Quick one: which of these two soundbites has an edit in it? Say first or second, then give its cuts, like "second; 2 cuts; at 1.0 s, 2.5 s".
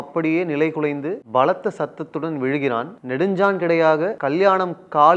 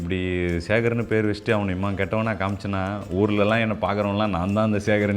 first; 3 cuts; at 1.2 s, 3.0 s, 4.2 s